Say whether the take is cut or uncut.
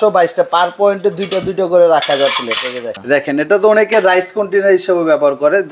cut